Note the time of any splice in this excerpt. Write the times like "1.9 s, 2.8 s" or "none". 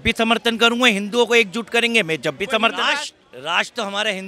2.9 s

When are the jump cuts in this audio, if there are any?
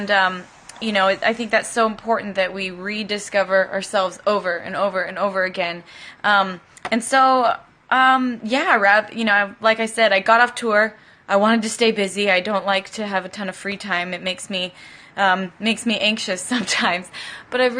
6.5 s

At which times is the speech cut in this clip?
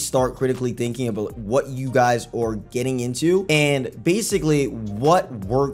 none

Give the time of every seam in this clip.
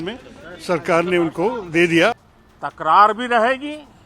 2.1 s

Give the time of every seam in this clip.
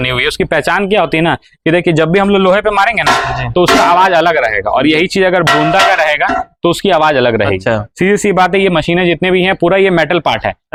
none

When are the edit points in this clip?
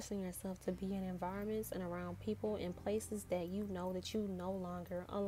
none

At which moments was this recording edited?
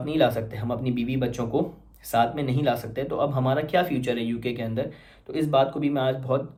none

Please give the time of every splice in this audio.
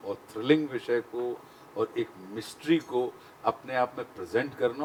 none

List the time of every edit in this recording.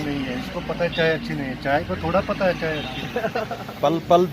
3.3 s

